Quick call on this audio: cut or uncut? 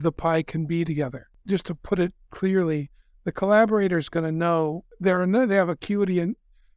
cut